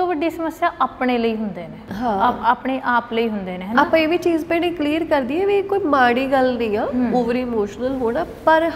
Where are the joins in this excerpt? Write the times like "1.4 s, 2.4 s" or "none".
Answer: none